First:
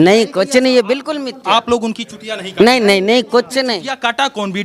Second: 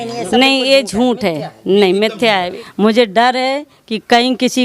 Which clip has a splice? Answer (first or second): second